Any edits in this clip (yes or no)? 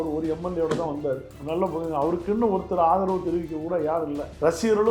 no